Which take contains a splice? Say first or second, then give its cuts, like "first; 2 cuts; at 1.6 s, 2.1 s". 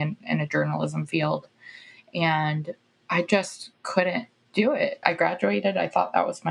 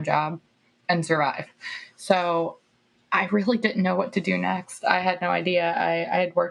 first; 1 cut; at 5.0 s